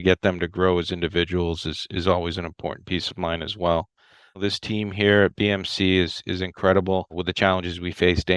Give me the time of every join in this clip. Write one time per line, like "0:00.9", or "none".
0:04.4
0:07.2